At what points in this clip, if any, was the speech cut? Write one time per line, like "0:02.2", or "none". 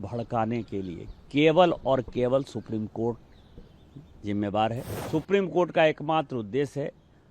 0:04.9